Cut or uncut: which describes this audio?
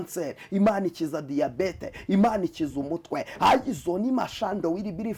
uncut